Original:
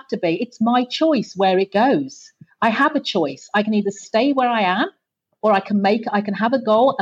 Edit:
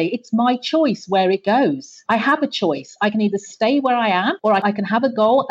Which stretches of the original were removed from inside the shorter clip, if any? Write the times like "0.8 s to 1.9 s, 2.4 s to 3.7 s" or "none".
2.2 s to 2.4 s, 5.1 s to 6.1 s